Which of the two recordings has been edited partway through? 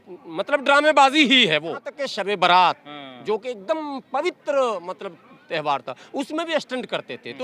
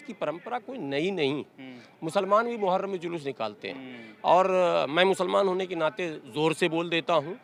first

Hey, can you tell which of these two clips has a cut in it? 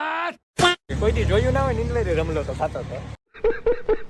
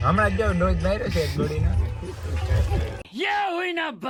first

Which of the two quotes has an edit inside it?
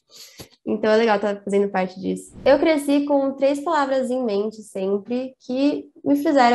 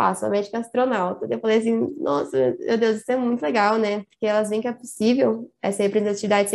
first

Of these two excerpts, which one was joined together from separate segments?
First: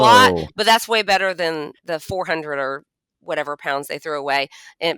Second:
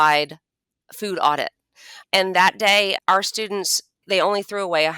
second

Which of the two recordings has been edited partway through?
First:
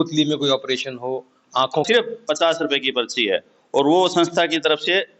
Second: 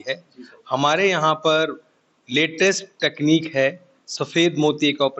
first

